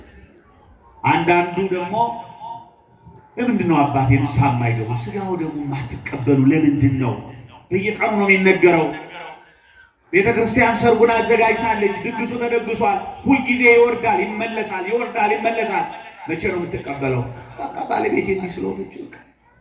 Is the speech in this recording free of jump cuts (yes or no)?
yes